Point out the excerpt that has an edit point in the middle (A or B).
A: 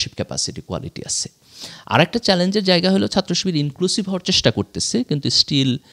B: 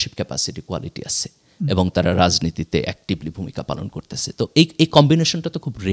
A